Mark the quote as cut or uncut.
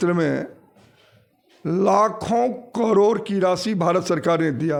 uncut